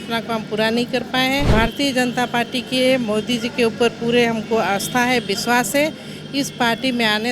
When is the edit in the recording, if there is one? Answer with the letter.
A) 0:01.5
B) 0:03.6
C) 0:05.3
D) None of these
A